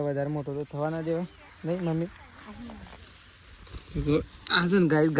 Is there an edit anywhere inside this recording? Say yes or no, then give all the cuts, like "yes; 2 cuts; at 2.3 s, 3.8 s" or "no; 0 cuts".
no; 0 cuts